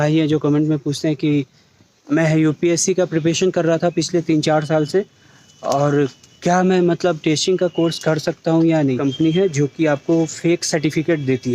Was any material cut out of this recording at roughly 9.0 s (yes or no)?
yes